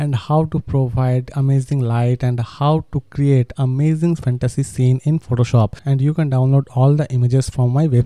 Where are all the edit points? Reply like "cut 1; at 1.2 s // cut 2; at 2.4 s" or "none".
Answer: cut 1; at 5.8 s